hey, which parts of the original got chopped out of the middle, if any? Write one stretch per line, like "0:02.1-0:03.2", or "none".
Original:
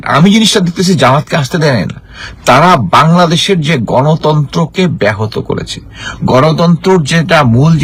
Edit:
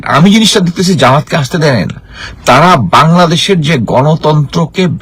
none